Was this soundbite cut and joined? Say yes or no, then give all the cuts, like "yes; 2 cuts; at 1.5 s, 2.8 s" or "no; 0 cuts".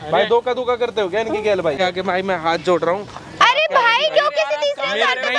yes; 1 cut; at 1.8 s